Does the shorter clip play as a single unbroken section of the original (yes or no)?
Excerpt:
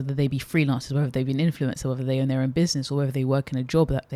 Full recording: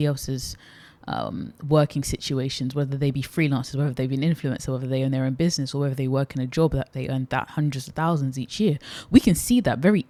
yes